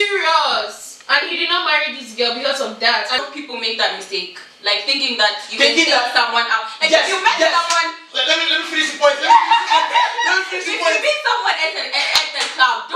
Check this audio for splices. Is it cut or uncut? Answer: cut